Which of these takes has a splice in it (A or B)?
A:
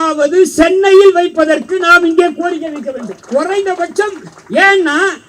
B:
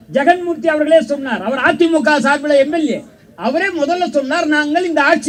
A